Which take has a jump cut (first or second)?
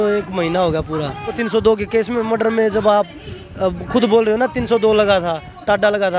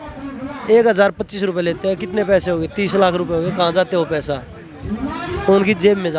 first